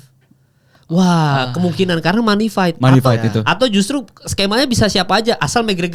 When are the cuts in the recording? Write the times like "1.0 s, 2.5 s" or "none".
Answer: none